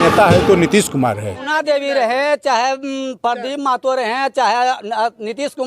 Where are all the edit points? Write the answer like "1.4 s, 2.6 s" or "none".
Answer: 1.5 s